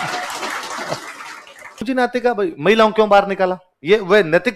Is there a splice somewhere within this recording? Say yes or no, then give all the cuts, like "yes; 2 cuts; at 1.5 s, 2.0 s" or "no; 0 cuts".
yes; 1 cut; at 1.8 s